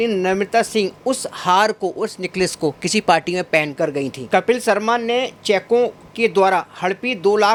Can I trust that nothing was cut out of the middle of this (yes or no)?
yes